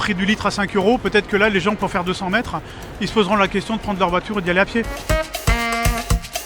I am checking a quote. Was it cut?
no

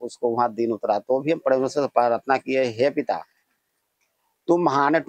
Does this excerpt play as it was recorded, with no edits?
yes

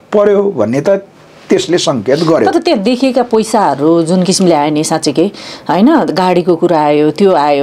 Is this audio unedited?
yes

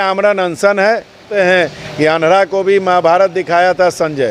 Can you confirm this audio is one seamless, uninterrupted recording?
no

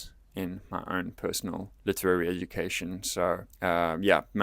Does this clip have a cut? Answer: yes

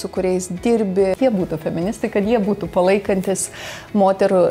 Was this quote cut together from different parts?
yes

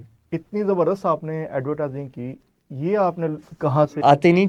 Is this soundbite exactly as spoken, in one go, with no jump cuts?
yes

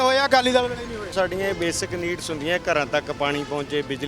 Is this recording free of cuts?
no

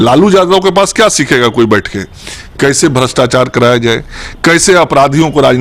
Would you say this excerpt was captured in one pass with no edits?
yes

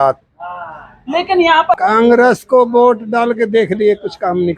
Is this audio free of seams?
no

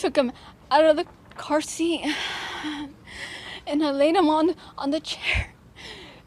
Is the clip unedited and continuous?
no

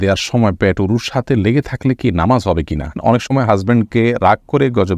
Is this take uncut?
no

